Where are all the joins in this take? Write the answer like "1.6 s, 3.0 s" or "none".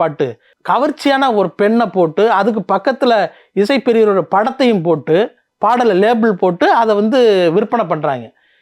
5.4 s